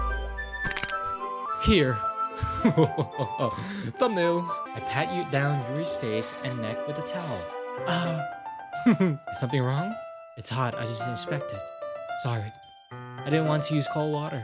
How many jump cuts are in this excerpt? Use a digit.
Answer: 1